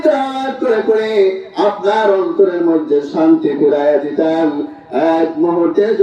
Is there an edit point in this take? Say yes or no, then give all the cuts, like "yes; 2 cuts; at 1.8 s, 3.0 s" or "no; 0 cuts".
no; 0 cuts